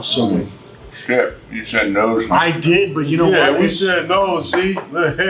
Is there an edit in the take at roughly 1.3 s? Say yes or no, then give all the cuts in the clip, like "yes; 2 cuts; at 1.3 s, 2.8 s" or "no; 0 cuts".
no; 0 cuts